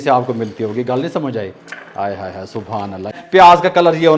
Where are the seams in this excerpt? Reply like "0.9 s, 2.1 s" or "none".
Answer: 3.2 s

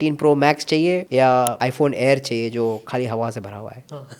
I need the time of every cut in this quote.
1.0 s, 1.5 s

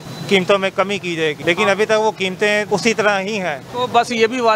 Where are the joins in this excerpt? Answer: 1.4 s, 2.7 s, 3.6 s

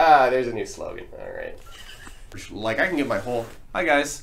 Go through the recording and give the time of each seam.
2.3 s

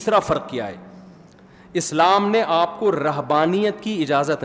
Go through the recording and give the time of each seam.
none

